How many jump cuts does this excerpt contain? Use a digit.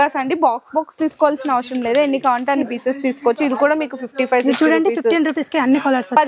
0